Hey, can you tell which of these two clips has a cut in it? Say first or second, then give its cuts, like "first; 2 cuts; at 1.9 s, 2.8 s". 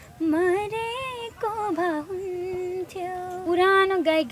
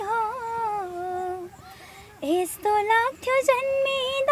first; 1 cut; at 3.4 s